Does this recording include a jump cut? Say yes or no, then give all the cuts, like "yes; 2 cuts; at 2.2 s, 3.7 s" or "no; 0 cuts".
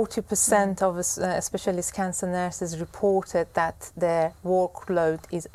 no; 0 cuts